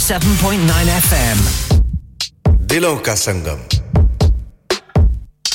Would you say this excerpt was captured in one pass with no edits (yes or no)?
no